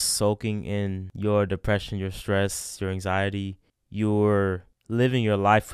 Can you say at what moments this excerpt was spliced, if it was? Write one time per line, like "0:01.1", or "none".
0:01.1